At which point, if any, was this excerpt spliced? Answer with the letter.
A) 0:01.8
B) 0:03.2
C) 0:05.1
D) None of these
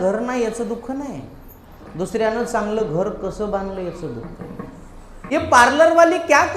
C